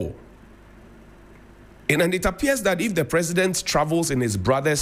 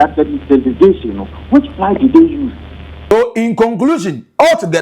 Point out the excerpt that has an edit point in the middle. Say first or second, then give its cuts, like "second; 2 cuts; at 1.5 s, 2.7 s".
second; 1 cut; at 3.1 s